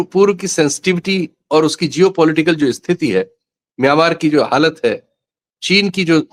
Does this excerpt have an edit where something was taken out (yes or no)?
no